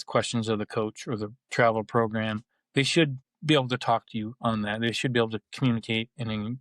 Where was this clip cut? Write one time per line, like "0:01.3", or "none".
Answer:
0:03.3